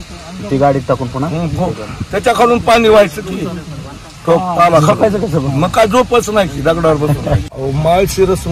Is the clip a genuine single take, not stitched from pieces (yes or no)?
no